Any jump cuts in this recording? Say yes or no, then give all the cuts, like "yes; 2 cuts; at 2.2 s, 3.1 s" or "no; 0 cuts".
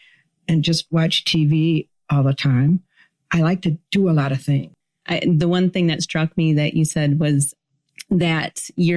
yes; 1 cut; at 4.7 s